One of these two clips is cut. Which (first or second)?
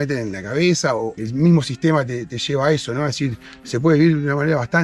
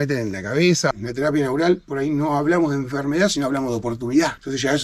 second